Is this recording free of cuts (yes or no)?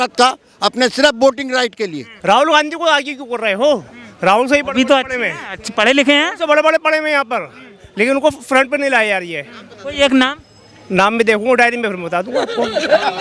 no